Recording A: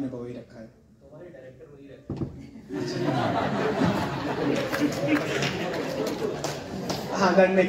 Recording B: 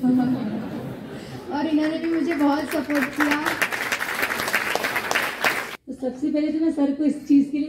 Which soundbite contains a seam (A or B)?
B